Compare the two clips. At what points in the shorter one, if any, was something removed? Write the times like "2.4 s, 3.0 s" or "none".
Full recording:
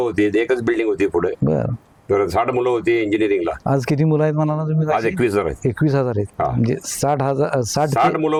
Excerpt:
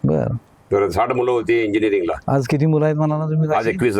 none